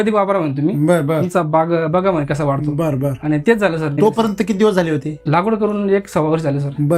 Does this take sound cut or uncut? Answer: cut